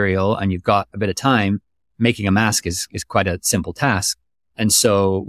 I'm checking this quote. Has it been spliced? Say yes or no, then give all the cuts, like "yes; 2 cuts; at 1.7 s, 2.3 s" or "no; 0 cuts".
no; 0 cuts